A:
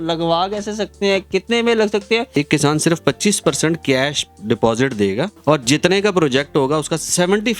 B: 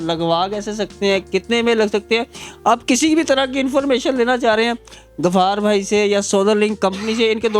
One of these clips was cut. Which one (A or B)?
A